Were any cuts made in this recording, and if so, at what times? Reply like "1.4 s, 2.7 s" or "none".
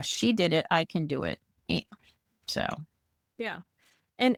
none